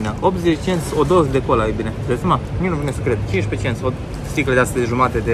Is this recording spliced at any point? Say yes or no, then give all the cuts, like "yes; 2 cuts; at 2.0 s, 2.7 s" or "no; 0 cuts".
no; 0 cuts